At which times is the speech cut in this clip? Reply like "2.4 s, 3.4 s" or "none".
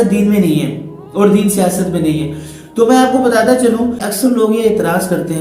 4.1 s